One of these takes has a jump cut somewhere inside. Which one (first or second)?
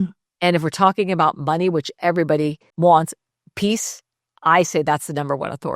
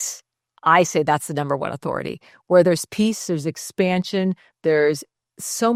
first